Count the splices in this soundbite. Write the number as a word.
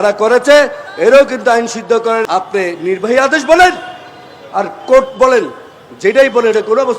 one